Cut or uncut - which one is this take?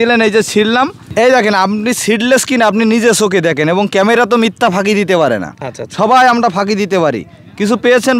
uncut